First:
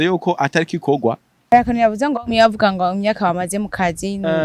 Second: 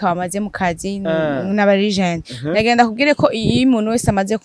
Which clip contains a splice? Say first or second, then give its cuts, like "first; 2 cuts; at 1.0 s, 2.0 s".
first; 1 cut; at 1.5 s